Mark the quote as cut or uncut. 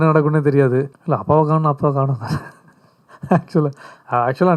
cut